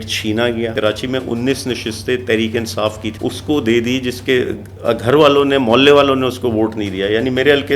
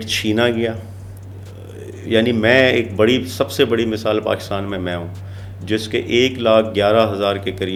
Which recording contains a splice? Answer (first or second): first